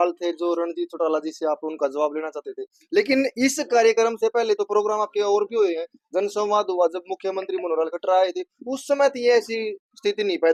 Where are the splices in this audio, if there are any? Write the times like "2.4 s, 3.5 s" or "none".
none

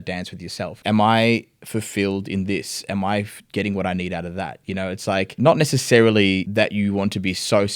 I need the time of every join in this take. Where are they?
0.8 s, 5.3 s, 6.5 s

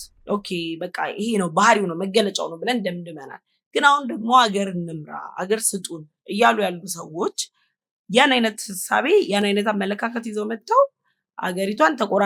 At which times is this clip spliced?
none

